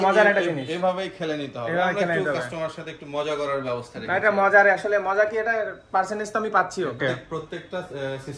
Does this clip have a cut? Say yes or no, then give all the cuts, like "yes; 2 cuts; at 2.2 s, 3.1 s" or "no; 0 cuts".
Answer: yes; 1 cut; at 7.0 s